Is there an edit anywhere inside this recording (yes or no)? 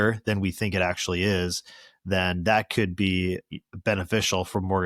no